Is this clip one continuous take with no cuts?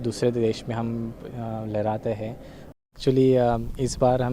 no; 1 cut; at 2.9 s

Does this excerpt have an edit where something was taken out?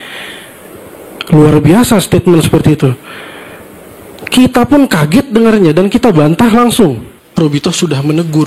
yes; 1 cut; at 7.2 s

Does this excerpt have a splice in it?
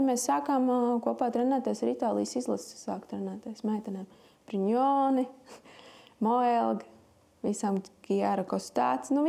no; 0 cuts

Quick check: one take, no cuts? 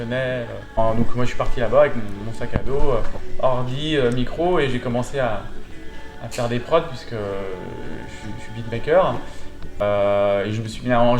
no; 2 cuts; at 0.8 s, 9.8 s

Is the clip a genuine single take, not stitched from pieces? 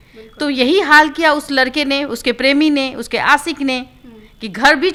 yes; 0 cuts

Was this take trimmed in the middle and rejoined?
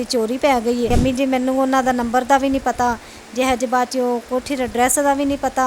yes; 1 cut; at 0.9 s

